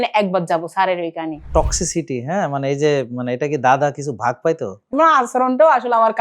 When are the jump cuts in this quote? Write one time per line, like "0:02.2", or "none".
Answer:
0:01.5
0:04.9